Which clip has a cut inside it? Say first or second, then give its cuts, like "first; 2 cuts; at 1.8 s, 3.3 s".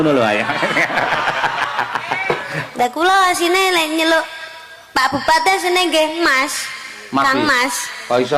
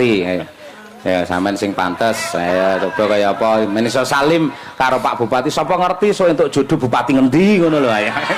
first; 1 cut; at 2.6 s